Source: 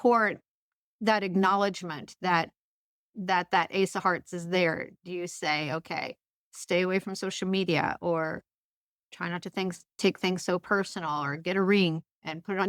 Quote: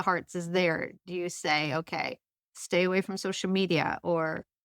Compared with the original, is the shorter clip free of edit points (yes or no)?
yes